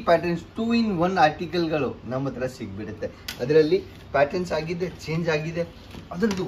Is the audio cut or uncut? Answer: uncut